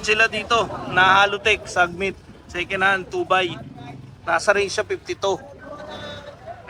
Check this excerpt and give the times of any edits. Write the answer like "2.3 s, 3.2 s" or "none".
none

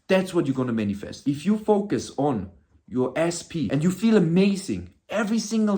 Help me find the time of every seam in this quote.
1.1 s, 3.7 s

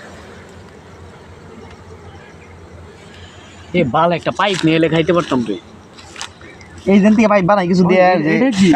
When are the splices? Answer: none

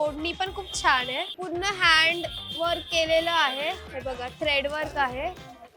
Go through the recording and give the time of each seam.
1.3 s

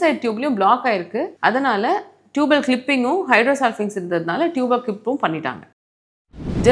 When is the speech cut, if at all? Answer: 1.3 s

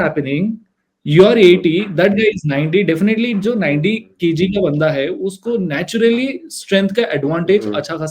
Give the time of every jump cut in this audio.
none

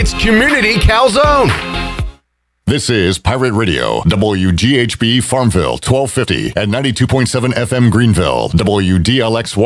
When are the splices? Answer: 2.3 s

